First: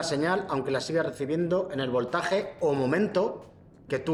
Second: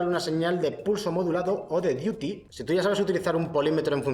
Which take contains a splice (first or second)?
second